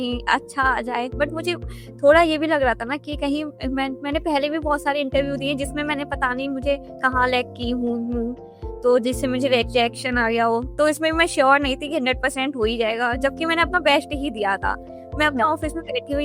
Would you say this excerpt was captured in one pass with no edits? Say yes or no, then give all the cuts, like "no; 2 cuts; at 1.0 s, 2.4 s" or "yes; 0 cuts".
yes; 0 cuts